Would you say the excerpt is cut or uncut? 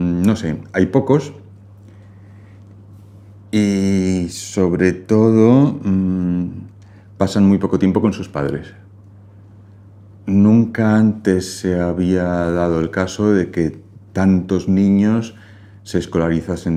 uncut